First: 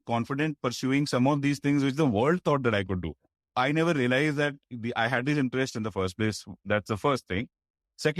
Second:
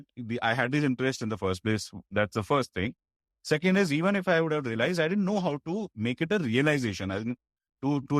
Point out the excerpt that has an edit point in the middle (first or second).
first